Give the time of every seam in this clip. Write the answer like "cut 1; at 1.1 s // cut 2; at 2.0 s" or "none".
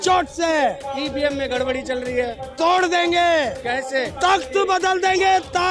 cut 1; at 3.8 s